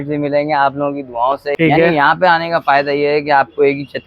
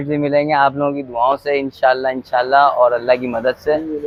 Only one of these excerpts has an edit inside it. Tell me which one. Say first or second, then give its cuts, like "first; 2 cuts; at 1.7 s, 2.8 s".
first; 1 cut; at 1.5 s